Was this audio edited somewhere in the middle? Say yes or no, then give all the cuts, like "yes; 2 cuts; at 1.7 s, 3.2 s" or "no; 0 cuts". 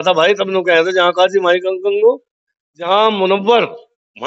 no; 0 cuts